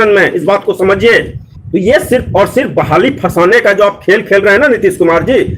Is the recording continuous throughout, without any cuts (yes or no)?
no